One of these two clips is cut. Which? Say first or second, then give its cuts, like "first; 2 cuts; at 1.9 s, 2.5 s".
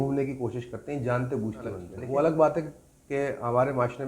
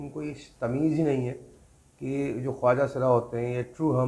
first; 1 cut; at 1.9 s